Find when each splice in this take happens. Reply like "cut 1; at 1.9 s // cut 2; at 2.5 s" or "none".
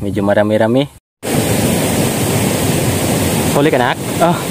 cut 1; at 1.0 s